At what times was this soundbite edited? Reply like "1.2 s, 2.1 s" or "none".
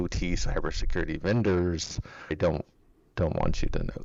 none